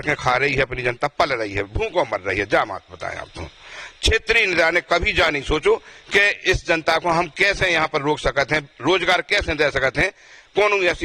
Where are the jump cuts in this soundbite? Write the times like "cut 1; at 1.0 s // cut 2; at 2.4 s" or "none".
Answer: none